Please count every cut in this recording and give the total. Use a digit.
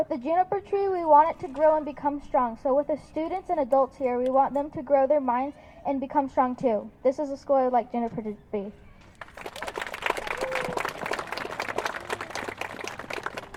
0